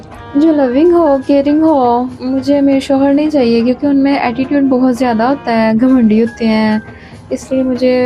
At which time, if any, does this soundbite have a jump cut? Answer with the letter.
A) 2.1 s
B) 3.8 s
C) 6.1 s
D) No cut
A